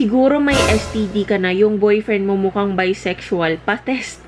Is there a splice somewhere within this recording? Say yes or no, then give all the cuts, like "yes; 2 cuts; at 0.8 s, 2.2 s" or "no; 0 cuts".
no; 0 cuts